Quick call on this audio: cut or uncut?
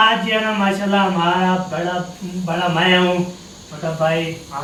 uncut